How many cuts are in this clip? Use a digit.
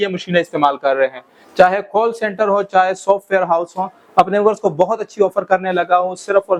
0